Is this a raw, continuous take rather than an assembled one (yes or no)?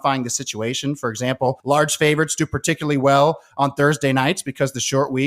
no